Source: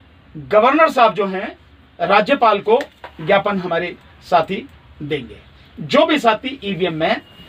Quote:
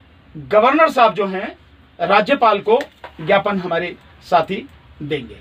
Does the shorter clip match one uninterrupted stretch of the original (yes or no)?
yes